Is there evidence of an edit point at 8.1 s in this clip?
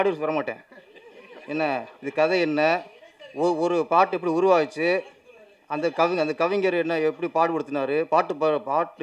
no; 0 cuts

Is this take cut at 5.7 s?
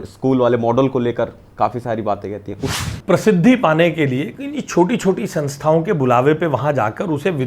no; 1 cut; at 2.7 s

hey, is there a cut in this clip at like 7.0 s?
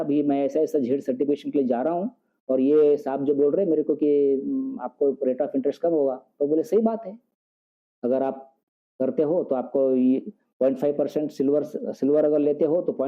no; 0 cuts

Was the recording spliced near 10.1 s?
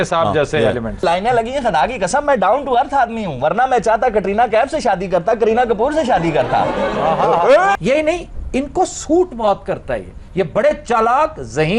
no; 2 cuts; at 1.0 s, 7.8 s

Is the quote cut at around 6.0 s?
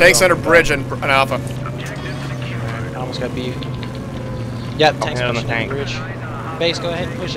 no; 0 cuts

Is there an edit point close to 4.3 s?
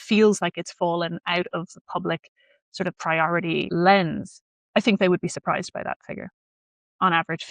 no; 0 cuts

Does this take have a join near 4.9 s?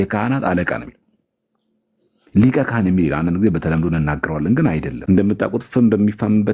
yes; 1 cut; at 4.9 s

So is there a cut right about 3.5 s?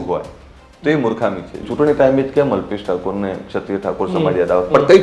no; 1 cut; at 1.6 s

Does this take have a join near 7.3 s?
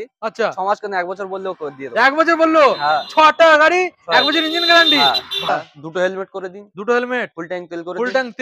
no; 1 cut; at 5.5 s

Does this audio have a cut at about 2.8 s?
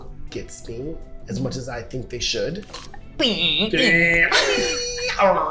yes; 1 cut; at 2.8 s

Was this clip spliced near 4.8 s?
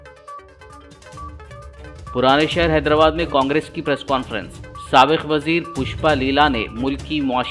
no; 1 cut; at 1.5 s

